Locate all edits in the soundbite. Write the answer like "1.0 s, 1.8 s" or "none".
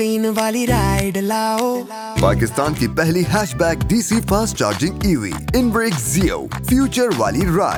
none